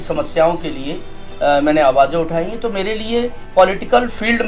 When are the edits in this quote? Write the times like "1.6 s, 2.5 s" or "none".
3.4 s